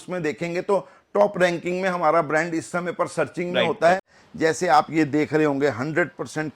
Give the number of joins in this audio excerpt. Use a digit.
1